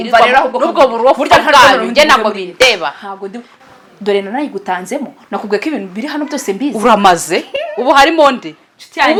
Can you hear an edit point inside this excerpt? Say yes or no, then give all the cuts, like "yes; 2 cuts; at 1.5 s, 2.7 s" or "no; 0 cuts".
no; 0 cuts